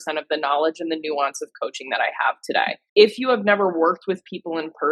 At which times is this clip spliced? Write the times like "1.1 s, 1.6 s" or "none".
2.8 s